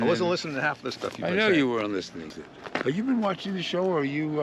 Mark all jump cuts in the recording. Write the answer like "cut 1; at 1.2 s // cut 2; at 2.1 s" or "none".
cut 1; at 2.4 s